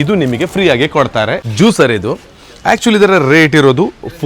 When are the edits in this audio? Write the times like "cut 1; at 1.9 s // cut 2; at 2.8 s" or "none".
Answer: cut 1; at 1.4 s